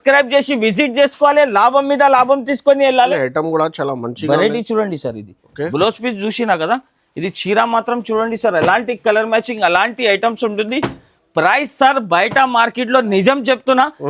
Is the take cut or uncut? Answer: cut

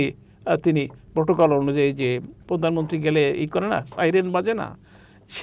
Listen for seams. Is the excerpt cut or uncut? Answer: cut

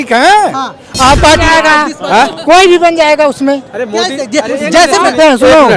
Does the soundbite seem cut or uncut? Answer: cut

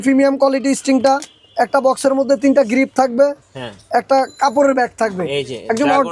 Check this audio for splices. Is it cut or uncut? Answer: uncut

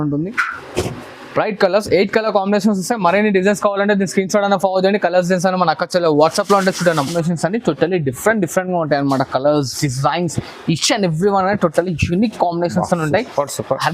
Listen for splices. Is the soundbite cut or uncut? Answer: cut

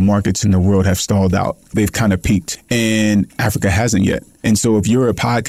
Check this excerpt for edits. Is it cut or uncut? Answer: cut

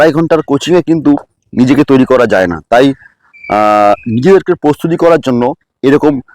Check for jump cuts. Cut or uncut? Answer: uncut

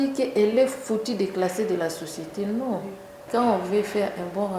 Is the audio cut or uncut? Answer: cut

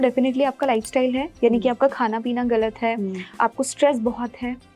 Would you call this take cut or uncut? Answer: cut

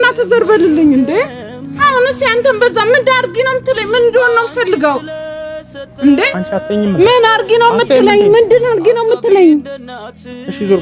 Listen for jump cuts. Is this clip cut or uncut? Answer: uncut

